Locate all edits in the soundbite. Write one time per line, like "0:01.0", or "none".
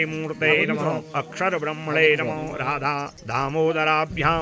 0:03.2